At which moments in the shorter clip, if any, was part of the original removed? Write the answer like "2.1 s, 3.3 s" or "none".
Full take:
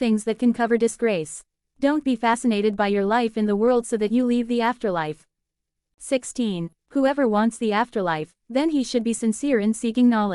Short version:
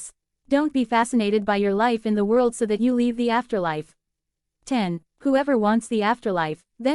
4.8 s